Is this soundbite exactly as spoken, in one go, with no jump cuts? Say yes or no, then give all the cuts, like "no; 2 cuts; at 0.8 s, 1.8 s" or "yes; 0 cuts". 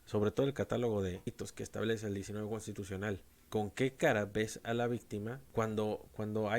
no; 3 cuts; at 1.3 s, 3.3 s, 5.4 s